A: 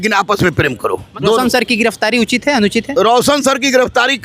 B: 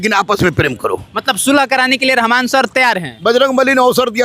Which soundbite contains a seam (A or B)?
A